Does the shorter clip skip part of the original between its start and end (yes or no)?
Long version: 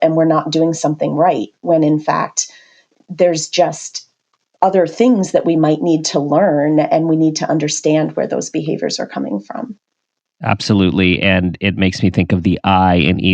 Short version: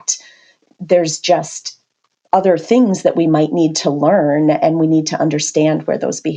no